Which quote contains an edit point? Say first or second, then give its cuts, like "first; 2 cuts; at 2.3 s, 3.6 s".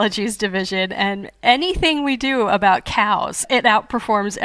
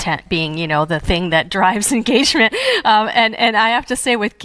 first; 1 cut; at 3.5 s